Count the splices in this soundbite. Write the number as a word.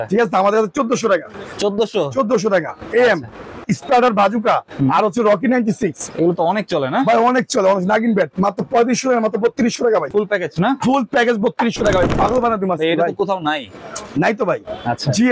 four